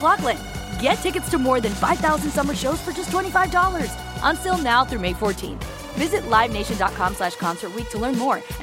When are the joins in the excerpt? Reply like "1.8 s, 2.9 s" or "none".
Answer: none